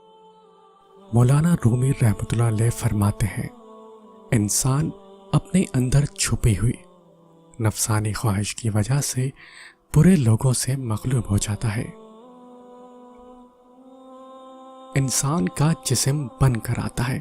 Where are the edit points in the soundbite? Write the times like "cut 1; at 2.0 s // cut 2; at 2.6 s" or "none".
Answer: cut 1; at 1.1 s